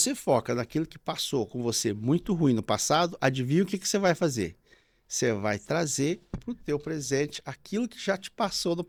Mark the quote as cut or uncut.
uncut